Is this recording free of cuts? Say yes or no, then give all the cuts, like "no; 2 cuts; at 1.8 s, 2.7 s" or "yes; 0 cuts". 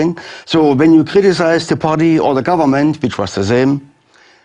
no; 1 cut; at 2.6 s